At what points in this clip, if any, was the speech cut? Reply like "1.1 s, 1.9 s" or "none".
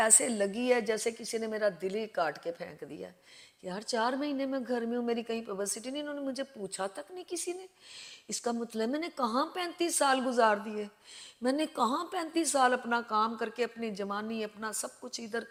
none

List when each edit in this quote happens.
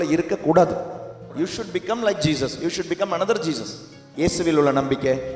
1.2 s, 4.1 s

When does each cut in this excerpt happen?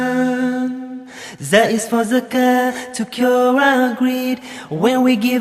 none

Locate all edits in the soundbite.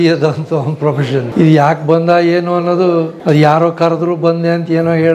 1.3 s, 3.1 s

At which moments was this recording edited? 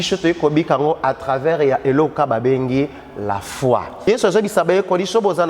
4.1 s

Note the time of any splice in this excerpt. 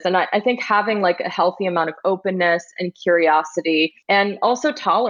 4.0 s

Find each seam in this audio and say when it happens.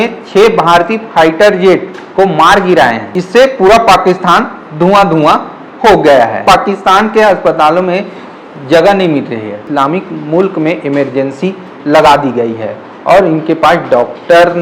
3.1 s, 6.4 s, 9.6 s

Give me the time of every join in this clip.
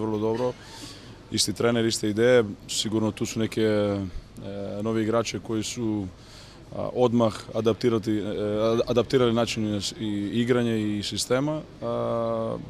7.1 s

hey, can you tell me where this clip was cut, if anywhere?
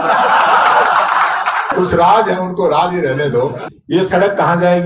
1.7 s, 3.6 s

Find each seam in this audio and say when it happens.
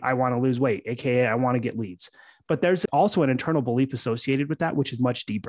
2.8 s

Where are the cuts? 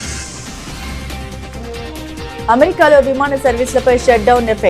2.2 s

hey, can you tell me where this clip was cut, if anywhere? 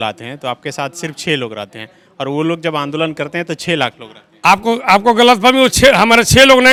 none

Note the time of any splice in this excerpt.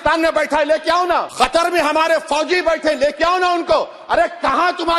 1.3 s

